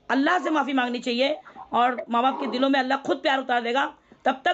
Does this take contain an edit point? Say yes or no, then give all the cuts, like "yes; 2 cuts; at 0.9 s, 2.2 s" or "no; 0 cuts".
yes; 1 cut; at 1.5 s